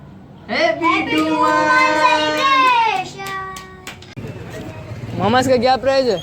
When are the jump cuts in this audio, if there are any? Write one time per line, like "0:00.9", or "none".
0:04.1